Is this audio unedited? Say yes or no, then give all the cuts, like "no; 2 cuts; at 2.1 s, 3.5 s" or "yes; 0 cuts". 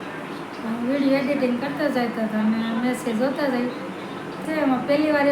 no; 1 cut; at 4.4 s